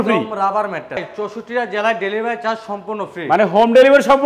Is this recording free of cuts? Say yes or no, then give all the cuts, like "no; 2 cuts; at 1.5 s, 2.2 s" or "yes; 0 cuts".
no; 1 cut; at 1.0 s